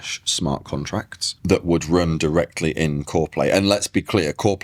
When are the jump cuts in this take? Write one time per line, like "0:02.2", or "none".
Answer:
none